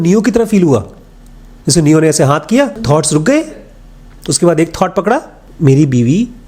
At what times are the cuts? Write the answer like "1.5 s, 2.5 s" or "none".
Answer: 2.8 s, 5.4 s